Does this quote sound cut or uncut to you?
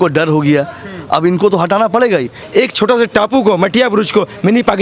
cut